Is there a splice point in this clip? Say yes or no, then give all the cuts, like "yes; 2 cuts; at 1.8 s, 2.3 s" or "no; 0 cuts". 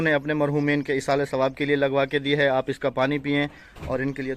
no; 0 cuts